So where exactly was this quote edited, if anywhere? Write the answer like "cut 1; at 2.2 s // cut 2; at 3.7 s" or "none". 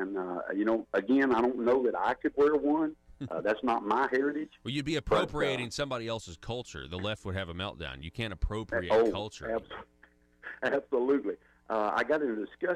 cut 1; at 9.7 s